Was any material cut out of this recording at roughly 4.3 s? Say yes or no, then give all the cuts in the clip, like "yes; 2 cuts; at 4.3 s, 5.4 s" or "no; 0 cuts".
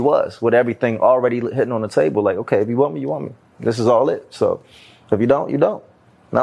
no; 0 cuts